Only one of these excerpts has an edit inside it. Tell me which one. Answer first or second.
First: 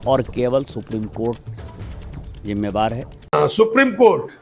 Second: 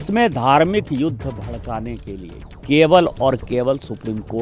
first